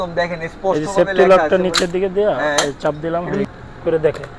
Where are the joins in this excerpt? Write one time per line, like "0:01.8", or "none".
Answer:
0:03.4